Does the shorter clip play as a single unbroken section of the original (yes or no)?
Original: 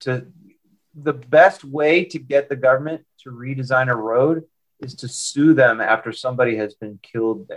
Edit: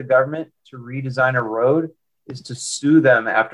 yes